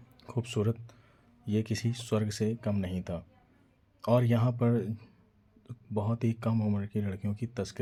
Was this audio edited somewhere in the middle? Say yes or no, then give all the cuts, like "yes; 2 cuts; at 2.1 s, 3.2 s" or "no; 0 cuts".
no; 0 cuts